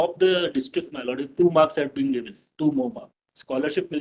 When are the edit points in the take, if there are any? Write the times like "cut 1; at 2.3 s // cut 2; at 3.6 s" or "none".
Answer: cut 1; at 3.1 s